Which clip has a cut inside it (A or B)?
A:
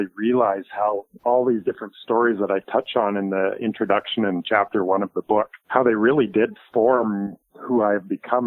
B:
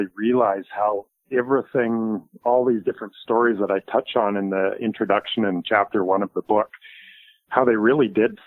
A